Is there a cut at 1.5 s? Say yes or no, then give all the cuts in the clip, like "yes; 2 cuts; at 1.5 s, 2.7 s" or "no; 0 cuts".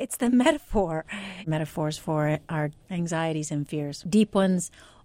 yes; 3 cuts; at 1.5 s, 2.8 s, 4.0 s